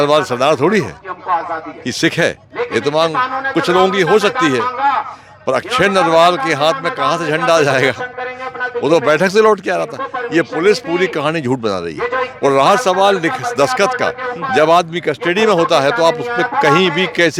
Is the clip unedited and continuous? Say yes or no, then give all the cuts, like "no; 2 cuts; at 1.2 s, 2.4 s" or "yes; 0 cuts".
yes; 0 cuts